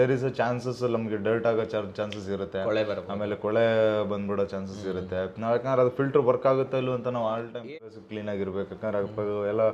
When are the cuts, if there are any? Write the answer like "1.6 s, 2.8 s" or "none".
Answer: 7.7 s